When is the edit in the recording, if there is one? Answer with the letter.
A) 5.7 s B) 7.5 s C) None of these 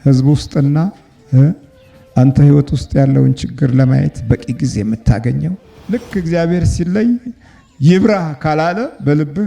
A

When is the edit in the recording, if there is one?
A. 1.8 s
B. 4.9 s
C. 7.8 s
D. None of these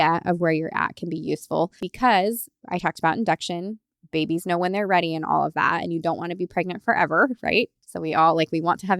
A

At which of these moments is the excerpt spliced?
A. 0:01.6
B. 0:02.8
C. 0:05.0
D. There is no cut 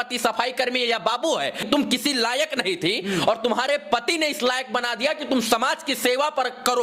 A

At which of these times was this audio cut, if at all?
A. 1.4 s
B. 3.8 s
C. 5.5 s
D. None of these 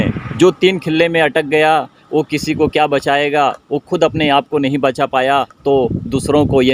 C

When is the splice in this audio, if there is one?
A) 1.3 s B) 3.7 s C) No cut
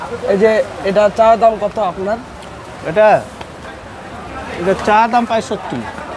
C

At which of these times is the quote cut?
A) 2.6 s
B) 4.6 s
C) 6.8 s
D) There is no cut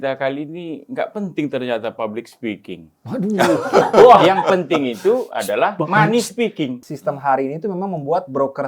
C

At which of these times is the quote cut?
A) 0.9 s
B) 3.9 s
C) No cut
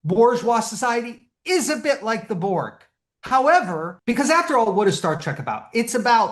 B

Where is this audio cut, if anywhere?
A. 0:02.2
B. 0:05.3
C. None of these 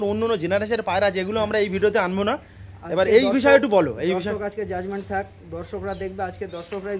C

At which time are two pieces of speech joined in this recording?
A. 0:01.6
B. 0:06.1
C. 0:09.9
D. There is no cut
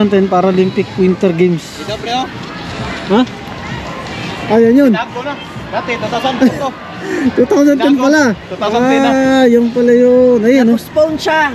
D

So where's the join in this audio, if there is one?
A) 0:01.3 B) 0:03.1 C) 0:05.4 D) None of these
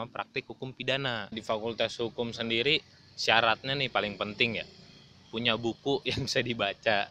A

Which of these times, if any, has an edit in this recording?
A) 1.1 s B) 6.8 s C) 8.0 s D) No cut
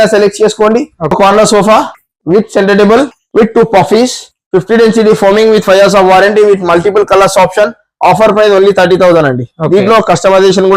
A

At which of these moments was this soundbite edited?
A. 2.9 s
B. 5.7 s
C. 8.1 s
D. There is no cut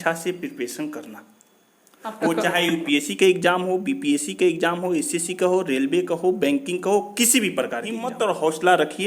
C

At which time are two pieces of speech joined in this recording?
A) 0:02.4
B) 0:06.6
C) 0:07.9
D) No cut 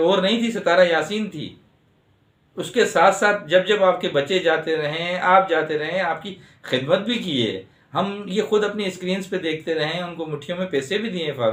D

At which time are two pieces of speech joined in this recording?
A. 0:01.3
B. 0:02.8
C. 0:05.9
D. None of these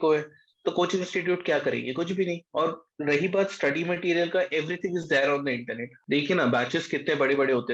C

